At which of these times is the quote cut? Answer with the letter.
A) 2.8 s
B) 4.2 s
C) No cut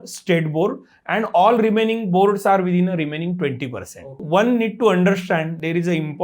B